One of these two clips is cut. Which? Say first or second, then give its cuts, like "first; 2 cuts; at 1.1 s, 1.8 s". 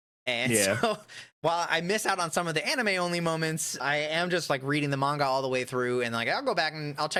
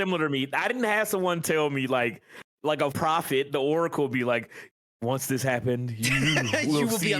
second; 1 cut; at 2.9 s